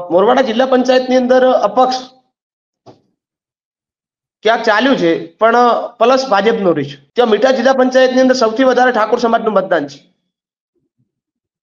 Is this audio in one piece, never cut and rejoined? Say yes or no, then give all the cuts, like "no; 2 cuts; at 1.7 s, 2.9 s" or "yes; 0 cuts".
no; 1 cut; at 7.0 s